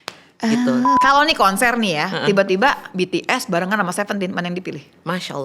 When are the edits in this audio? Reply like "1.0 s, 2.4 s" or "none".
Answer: 1.0 s